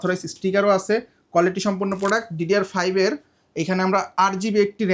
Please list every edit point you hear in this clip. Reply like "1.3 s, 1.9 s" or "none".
none